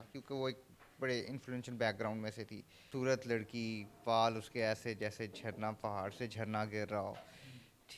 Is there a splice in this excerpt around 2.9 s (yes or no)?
yes